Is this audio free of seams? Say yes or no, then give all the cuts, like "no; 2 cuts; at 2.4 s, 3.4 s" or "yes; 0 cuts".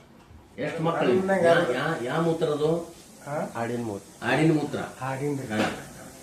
no; 1 cut; at 1.1 s